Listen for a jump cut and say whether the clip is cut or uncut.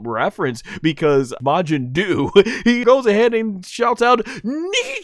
cut